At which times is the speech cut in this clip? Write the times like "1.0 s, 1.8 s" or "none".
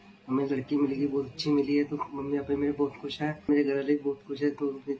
3.5 s